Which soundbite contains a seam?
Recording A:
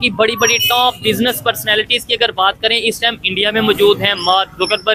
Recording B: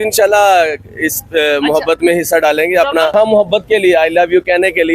B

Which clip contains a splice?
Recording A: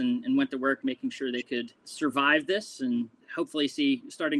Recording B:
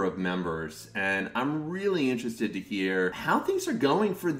A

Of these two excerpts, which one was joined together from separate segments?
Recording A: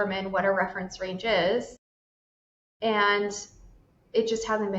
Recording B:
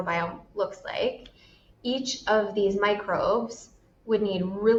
A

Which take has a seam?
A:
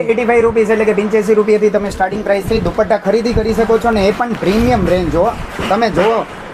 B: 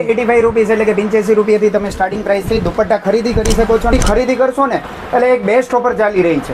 B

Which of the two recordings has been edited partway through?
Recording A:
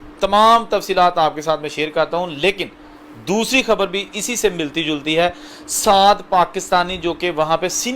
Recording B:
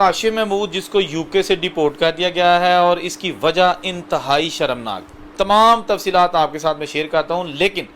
A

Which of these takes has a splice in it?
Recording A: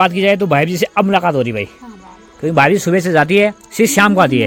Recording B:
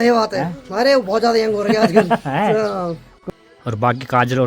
B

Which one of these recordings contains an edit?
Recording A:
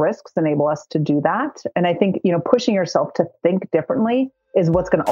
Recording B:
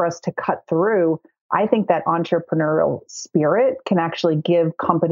A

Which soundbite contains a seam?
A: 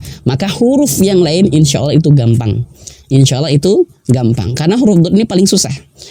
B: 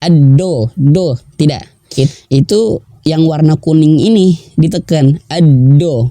B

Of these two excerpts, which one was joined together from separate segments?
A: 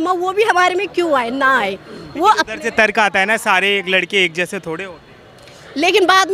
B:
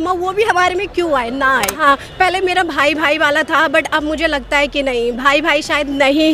B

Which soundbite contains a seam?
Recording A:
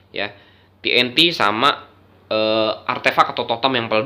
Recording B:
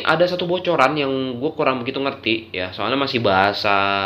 B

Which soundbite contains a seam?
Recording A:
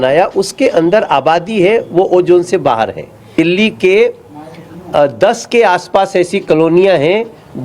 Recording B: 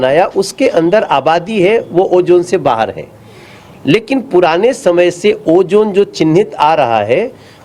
A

